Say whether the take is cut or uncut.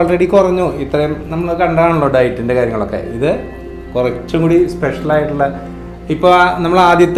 uncut